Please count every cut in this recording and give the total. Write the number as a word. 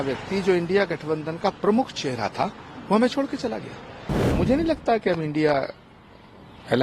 one